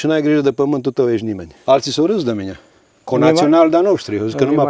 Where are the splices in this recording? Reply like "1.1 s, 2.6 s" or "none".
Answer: 1.5 s